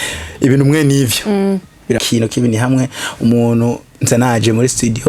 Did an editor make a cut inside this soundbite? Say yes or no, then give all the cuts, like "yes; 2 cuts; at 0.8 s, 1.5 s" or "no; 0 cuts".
yes; 1 cut; at 2.0 s